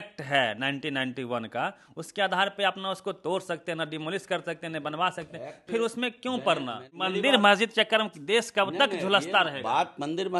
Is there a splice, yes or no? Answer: yes